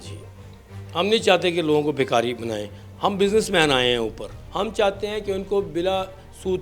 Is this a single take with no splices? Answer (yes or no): no